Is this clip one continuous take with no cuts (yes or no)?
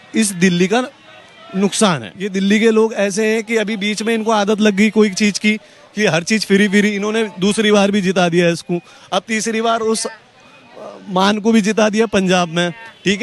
no